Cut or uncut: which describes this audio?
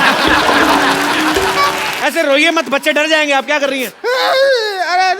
cut